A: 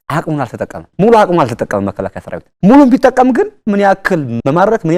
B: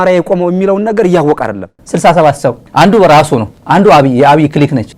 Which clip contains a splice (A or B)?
B